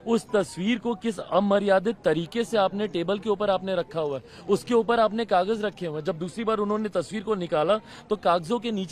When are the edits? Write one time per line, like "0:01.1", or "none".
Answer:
none